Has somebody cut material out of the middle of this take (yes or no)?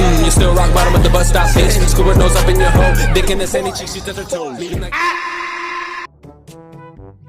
yes